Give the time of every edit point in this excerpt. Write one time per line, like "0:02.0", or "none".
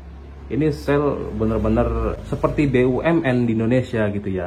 0:02.2